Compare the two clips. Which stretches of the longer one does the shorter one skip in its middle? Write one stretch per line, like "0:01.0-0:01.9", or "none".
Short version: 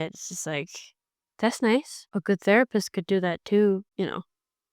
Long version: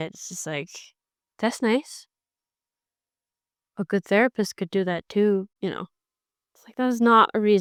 0:02.0-0:03.6